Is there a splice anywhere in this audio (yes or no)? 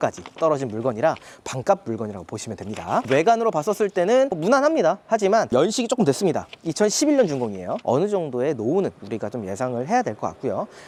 no